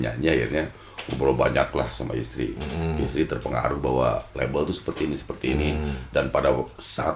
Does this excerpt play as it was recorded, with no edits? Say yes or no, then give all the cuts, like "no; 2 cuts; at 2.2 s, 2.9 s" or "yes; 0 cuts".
yes; 0 cuts